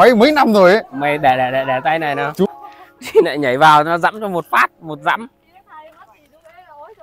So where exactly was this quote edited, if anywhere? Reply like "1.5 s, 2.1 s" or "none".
2.5 s